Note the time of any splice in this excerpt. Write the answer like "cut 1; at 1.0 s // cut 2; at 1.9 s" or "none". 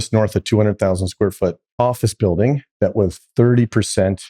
cut 1; at 1.6 s // cut 2; at 3.2 s